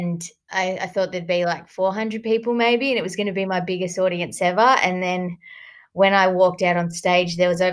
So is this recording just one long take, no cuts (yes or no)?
yes